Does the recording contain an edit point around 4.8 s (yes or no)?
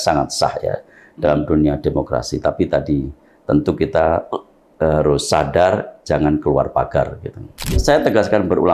no